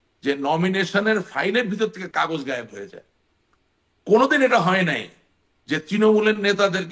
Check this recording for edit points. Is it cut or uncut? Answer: uncut